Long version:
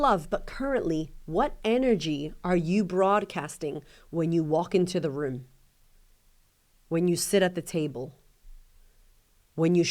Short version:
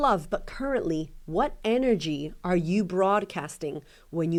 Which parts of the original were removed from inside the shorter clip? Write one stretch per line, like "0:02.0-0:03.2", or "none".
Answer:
none